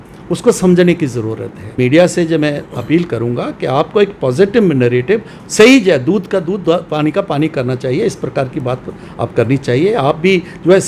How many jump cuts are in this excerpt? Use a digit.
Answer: 1